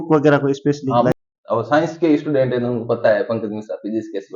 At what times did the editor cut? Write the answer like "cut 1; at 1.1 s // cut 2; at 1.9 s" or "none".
cut 1; at 1.2 s